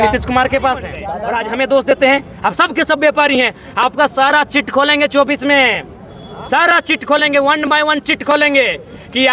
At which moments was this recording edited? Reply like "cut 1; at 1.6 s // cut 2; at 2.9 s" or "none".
cut 1; at 1.0 s